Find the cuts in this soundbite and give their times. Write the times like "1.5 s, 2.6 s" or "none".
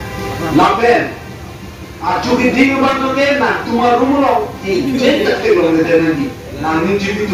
none